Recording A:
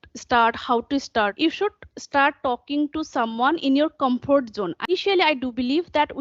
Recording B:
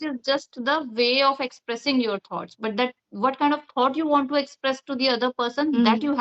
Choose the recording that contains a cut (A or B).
A